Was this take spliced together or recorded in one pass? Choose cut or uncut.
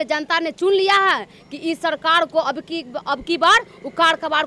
uncut